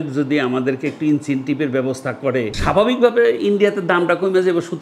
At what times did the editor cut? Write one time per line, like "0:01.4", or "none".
0:02.5